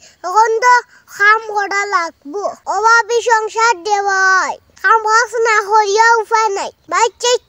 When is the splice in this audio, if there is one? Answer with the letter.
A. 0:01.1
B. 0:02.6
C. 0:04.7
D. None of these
B